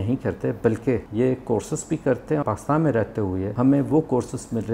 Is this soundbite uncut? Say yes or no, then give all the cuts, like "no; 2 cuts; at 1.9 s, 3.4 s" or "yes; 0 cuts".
no; 3 cuts; at 1.1 s, 2.4 s, 3.5 s